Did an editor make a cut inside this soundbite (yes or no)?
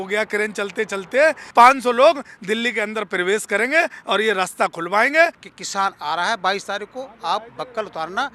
yes